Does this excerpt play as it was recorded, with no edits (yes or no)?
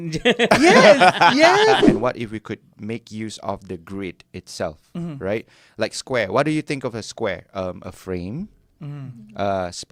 no